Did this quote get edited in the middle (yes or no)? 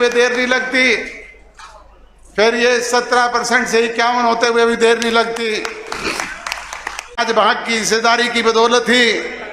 yes